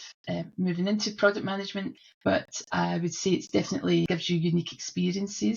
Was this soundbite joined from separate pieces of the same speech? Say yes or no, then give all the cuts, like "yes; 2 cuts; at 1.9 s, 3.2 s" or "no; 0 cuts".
yes; 2 cuts; at 2.0 s, 4.1 s